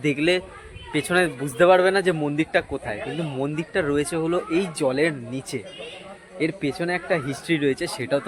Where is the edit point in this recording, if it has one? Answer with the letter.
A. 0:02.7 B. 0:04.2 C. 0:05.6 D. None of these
D